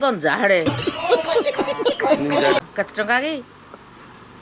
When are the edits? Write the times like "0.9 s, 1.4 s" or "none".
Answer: 2.6 s